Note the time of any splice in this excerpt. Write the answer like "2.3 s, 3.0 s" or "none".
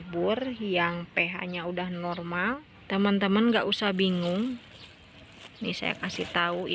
2.7 s